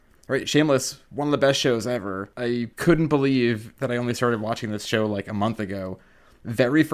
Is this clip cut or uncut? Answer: cut